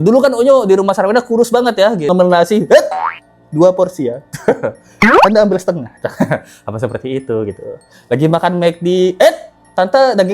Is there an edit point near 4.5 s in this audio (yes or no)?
no